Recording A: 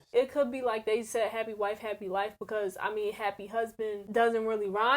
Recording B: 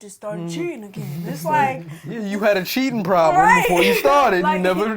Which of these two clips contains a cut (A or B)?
A